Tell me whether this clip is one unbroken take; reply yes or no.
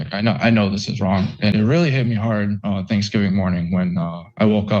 no